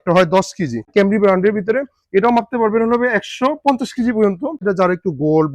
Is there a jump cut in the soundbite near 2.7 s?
no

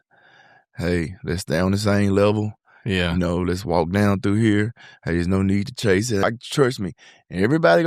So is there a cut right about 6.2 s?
yes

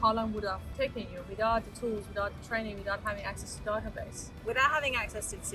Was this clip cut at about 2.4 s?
no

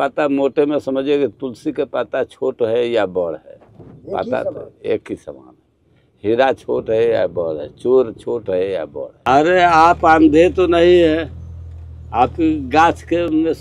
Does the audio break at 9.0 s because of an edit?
yes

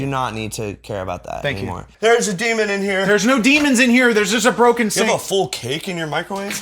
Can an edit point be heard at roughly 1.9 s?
yes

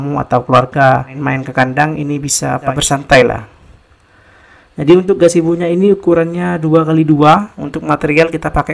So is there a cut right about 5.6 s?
no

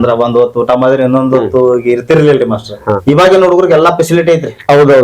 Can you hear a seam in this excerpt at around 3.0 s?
yes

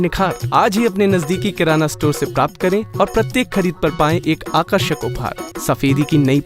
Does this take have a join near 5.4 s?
yes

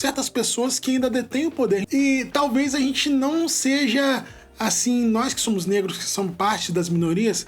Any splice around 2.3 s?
yes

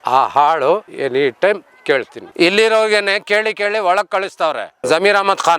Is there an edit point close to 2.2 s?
yes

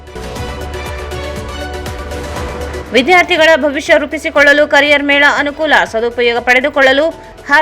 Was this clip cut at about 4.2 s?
no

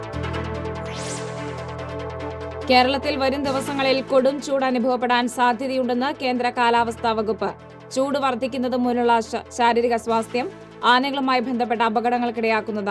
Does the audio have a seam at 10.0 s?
no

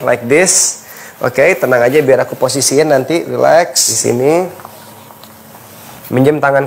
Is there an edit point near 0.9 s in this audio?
no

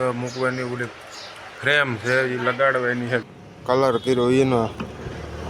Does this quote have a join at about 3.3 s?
yes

